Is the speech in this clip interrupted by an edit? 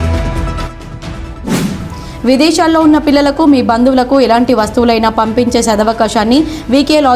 yes; 1 cut; at 1.6 s

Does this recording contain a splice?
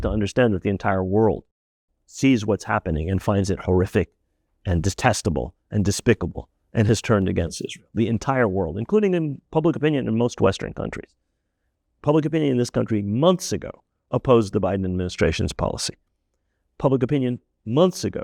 no; 0 cuts

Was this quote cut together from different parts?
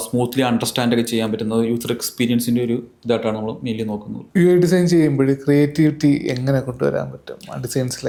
no; 0 cuts

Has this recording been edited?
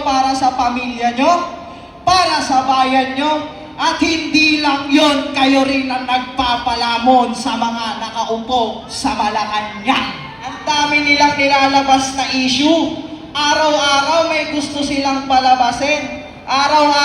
yes; 1 cut; at 10.8 s

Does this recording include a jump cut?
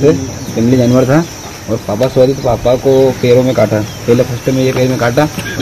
no; 0 cuts

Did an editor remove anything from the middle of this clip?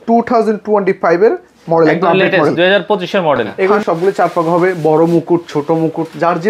yes; 1 cut; at 3.5 s

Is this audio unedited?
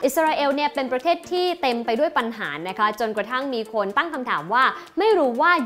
yes; 0 cuts

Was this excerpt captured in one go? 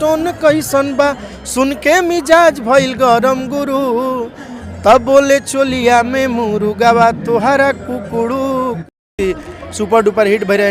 yes; 0 cuts

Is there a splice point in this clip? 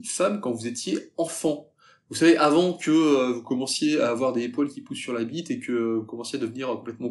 no; 0 cuts

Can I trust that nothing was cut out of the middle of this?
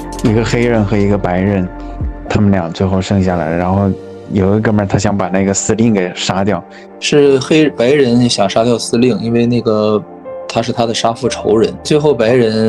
no; 3 cuts; at 2.3 s, 6.9 s, 11.9 s

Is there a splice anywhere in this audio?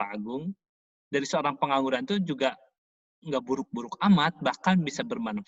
no; 0 cuts

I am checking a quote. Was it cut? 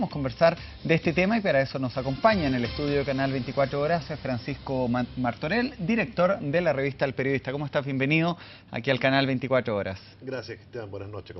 yes; 1 cut; at 6.3 s

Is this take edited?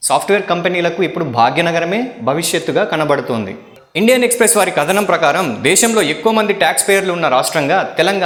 no; 0 cuts

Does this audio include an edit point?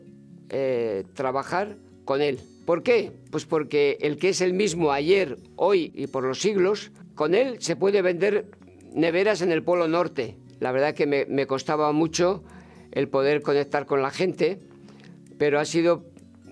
yes; 4 cuts; at 2.5 s, 5.9 s, 7.0 s, 10.6 s

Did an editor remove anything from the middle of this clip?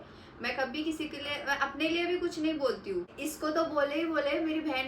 yes; 1 cut; at 3.2 s

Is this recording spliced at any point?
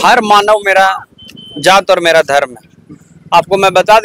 no; 0 cuts

